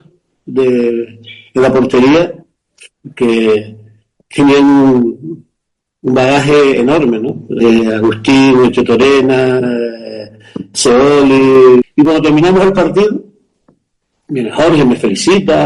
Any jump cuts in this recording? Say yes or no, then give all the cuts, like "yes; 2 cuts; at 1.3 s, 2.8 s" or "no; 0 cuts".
yes; 2 cuts; at 7.6 s, 11.9 s